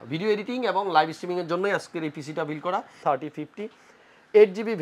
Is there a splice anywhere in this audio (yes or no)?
yes